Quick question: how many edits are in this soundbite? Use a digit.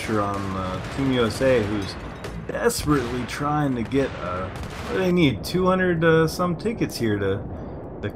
0